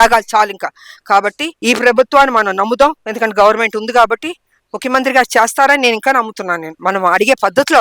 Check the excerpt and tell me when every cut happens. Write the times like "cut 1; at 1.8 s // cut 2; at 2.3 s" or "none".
cut 1; at 1.5 s // cut 2; at 6.7 s